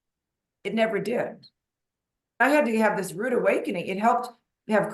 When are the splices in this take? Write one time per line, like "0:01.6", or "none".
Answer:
0:02.4